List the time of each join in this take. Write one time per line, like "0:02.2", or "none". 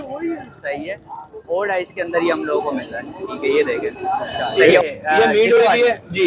0:04.8